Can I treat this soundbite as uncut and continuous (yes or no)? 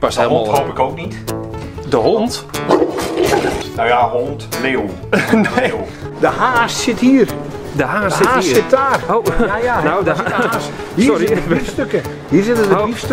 no